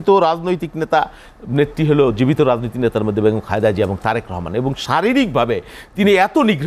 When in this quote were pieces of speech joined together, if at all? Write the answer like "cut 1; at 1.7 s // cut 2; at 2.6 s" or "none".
none